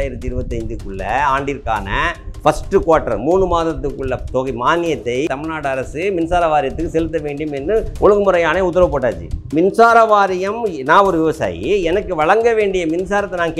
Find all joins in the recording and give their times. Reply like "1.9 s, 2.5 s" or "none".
2.2 s, 5.3 s, 9.5 s